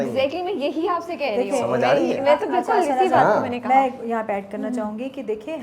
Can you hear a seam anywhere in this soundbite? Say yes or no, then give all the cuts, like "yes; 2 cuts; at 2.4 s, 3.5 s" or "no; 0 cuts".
no; 0 cuts